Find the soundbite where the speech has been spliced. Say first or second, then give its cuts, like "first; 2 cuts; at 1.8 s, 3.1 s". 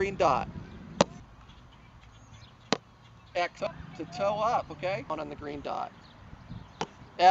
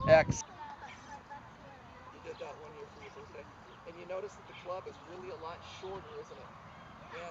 first; 1 cut; at 1.2 s